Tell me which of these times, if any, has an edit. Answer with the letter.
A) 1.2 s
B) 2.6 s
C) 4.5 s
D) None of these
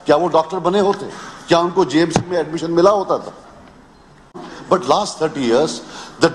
C